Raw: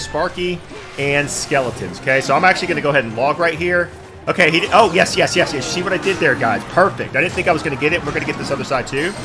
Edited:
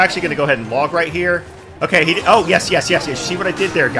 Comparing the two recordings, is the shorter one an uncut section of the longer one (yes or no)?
yes